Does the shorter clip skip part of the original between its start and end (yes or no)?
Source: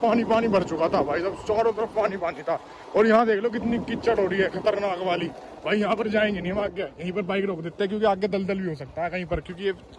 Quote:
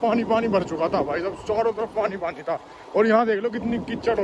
no